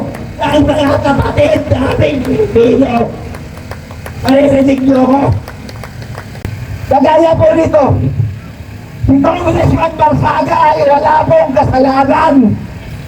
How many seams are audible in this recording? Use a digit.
1